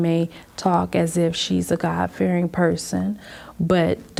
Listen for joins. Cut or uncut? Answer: uncut